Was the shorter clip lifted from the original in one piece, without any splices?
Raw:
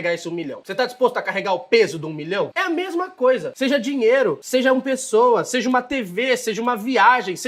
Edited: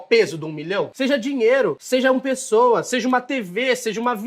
no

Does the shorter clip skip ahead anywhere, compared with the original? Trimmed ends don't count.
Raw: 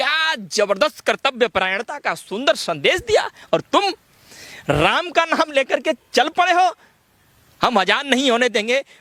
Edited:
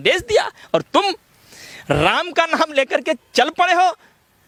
no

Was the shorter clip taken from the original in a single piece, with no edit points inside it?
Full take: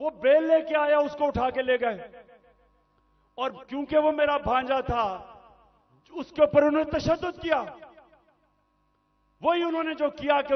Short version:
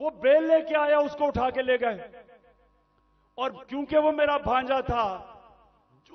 yes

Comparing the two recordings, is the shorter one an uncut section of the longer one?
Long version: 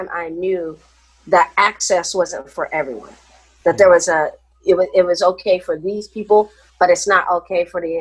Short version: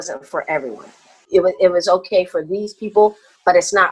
no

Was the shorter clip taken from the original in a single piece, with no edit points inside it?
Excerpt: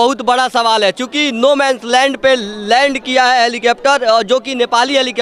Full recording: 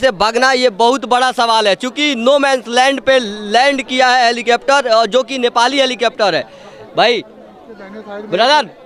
yes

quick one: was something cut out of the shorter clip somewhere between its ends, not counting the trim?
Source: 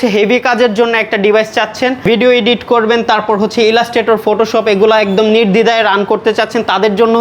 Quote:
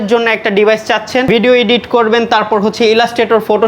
yes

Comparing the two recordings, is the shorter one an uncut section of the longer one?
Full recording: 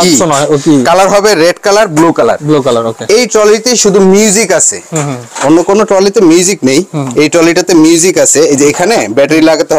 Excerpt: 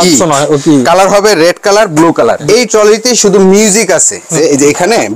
no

